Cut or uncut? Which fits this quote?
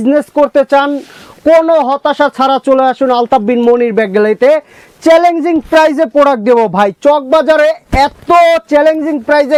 uncut